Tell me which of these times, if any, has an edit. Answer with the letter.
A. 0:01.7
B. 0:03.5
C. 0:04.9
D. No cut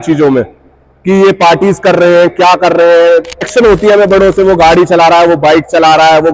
B